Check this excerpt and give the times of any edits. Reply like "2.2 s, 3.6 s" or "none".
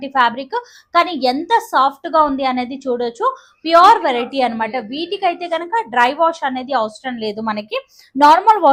none